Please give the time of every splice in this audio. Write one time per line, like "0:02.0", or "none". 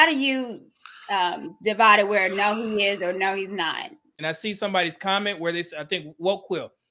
0:04.1

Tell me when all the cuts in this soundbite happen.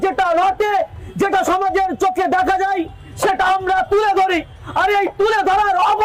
none

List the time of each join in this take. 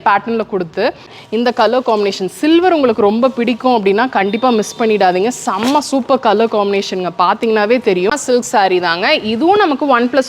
0:01.2
0:08.1

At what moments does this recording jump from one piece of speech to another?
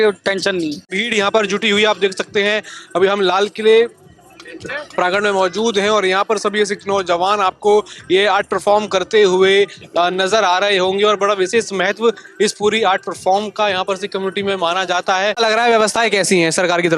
0:01.0
0:15.4

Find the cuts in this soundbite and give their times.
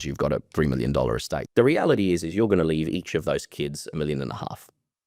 0:01.4

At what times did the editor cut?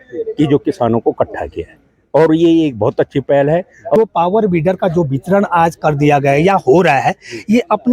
0:04.0

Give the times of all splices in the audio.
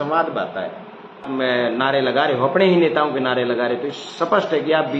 0:01.3

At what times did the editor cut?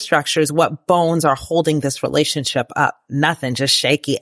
none

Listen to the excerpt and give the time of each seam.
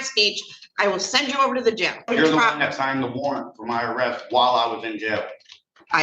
0:02.1

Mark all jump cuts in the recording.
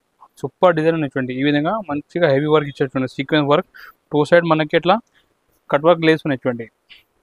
none

